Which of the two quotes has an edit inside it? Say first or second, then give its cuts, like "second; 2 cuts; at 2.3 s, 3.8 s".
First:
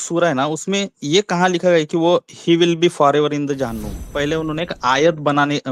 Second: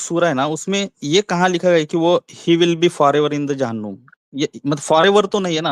first; 1 cut; at 4.0 s